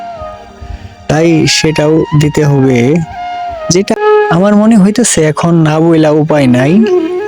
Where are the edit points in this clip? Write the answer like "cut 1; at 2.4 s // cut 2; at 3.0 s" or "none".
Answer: cut 1; at 3.9 s